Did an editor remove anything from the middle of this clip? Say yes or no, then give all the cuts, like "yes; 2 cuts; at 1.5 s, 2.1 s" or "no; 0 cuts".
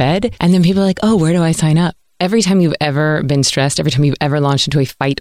yes; 1 cut; at 2.0 s